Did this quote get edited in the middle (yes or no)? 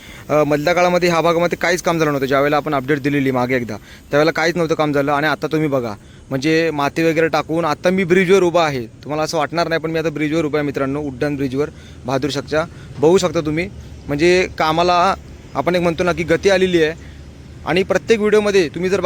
no